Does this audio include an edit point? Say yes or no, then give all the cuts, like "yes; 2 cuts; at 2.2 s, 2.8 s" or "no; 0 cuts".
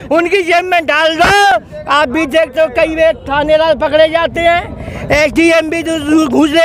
no; 0 cuts